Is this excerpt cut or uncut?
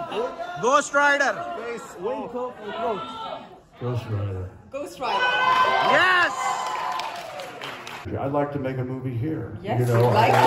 cut